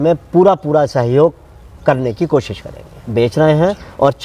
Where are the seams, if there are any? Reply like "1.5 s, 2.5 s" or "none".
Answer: 3.1 s